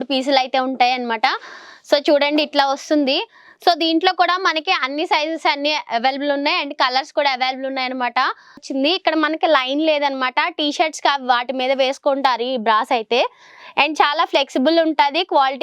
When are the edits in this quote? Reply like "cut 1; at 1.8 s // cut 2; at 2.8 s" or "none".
cut 1; at 8.7 s